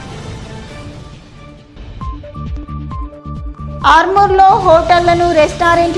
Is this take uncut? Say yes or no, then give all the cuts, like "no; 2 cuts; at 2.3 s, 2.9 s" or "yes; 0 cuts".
no; 2 cuts; at 2.2 s, 3.5 s